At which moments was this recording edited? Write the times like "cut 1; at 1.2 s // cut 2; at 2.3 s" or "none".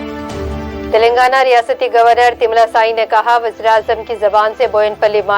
cut 1; at 0.9 s